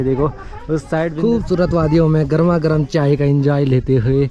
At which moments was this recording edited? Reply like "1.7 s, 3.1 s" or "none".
1.1 s